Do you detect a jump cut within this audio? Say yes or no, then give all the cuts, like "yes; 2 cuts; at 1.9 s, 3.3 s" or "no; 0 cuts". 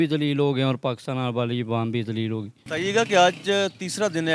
no; 0 cuts